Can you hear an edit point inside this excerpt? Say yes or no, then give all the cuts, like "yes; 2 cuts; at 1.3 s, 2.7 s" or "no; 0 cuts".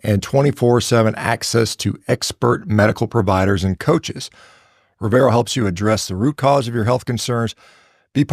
no; 0 cuts